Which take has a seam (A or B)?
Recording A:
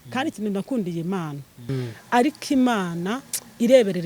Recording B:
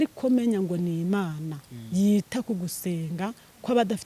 A